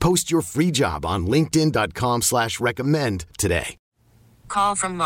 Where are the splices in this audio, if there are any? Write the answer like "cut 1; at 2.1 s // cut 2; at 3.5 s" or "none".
cut 1; at 4.0 s